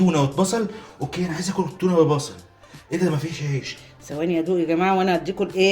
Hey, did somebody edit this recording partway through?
yes; 1 cut; at 3.7 s

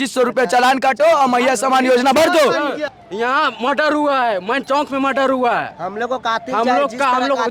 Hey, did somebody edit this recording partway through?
yes; 1 cut; at 2.9 s

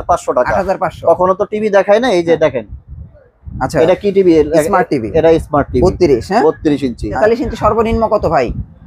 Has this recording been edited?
yes; 1 cut; at 7.1 s

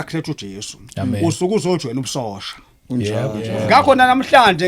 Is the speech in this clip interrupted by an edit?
yes; 1 cut; at 3.4 s

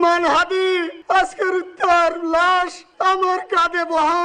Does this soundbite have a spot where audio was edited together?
yes; 2 cuts; at 0.9 s, 2.8 s

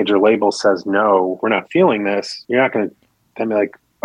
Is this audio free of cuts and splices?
no; 2 cuts; at 1.4 s, 2.4 s

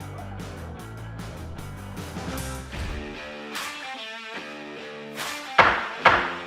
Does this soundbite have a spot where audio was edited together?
yes; 2 cuts; at 2.7 s, 5.5 s

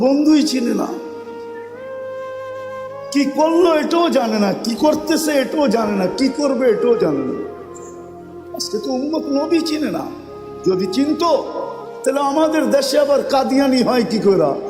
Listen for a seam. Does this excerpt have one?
yes; 2 cuts; at 1.1 s, 2.8 s

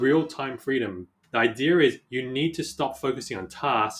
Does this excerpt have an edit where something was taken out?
yes; 1 cut; at 1.2 s

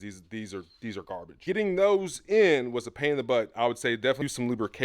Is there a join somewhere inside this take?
yes; 1 cut; at 1.4 s

